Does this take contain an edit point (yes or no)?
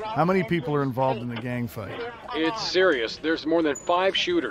no